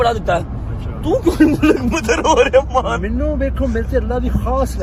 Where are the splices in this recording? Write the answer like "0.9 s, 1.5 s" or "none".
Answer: none